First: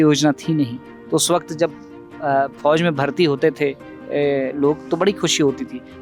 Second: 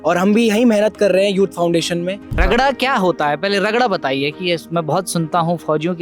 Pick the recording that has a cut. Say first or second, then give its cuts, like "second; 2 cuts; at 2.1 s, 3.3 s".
second; 1 cut; at 2.4 s